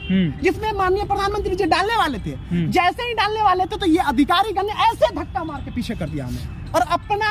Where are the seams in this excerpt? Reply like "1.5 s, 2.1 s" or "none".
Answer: none